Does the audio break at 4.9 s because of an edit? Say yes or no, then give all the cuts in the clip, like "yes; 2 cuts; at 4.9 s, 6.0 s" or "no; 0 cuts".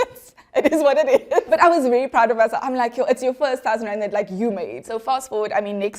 yes; 2 cuts; at 1.5 s, 4.9 s